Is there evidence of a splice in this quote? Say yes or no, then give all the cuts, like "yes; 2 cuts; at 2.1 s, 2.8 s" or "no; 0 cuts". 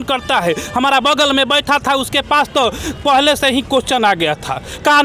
no; 0 cuts